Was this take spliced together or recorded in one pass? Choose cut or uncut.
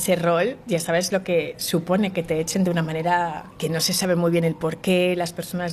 cut